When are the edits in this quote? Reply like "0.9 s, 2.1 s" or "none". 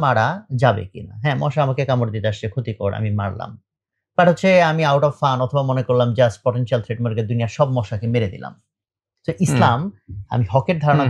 none